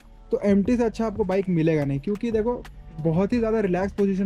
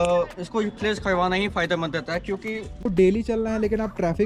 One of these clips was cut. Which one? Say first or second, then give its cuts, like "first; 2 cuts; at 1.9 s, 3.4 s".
second; 1 cut; at 2.8 s